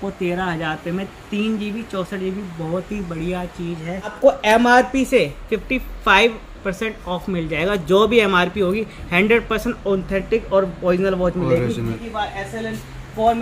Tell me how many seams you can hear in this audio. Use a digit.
2